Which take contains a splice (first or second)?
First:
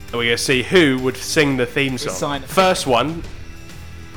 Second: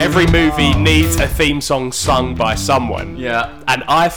first